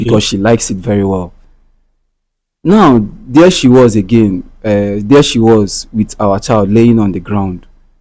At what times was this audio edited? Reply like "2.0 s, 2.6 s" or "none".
none

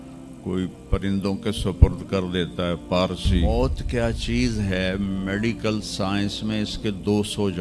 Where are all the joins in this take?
3.4 s

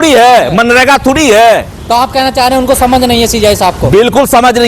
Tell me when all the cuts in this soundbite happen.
1.7 s

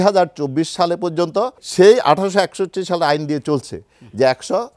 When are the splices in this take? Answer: 1.6 s

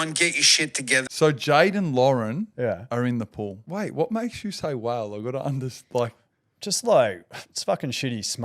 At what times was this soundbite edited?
1.1 s, 3.6 s

